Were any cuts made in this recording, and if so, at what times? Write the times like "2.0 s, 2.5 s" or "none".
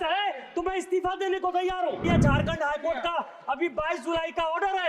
2.0 s

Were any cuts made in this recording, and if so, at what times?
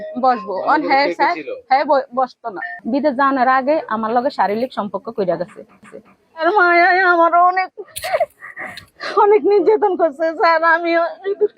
2.8 s, 6.0 s

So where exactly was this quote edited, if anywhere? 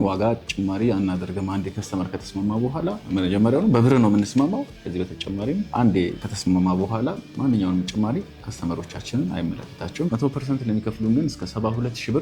10.1 s

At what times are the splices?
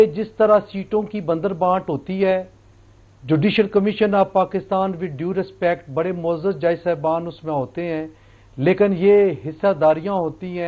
none

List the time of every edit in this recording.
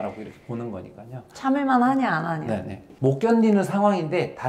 2.9 s

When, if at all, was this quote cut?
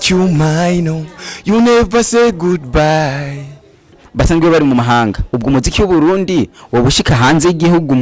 4.0 s

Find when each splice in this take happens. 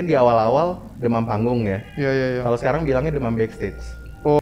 none

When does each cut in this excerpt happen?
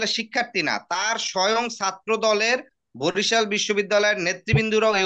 none

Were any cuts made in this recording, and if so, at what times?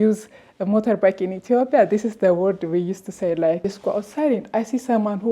3.6 s

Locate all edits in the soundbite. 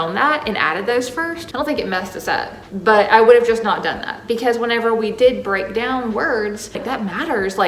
1.4 s, 6.8 s

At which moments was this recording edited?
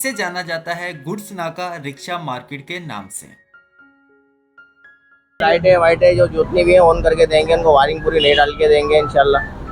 5.4 s

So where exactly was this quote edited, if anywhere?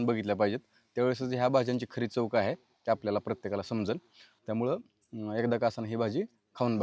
none

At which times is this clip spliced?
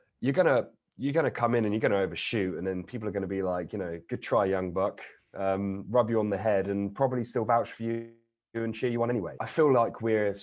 4.0 s, 9.4 s

